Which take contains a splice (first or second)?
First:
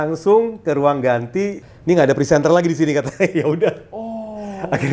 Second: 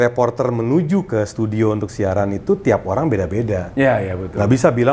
first